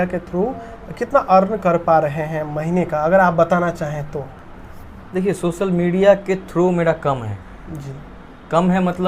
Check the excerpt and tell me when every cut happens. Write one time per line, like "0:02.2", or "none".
none